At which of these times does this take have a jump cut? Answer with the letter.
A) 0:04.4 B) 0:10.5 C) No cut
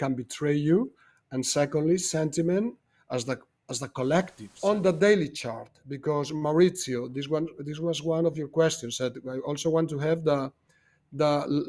A